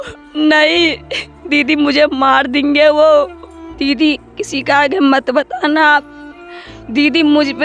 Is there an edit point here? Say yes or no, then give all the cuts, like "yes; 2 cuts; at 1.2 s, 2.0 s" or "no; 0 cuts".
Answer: yes; 1 cut; at 3.6 s